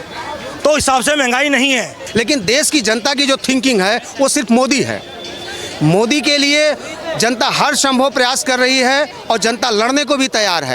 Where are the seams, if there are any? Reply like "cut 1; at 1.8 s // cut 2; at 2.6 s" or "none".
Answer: cut 1; at 2.0 s